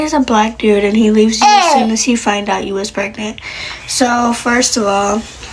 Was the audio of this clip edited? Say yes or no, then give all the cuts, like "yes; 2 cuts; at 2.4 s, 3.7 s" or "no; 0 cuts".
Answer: no; 0 cuts